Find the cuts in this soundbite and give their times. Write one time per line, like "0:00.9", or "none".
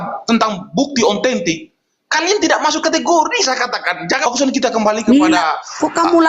0:04.2